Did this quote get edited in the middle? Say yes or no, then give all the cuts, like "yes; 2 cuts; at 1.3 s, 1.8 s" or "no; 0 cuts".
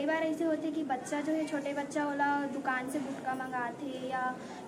no; 0 cuts